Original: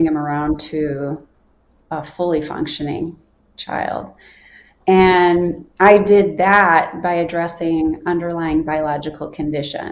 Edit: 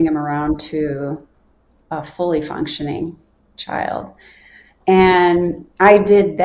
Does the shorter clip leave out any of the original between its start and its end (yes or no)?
no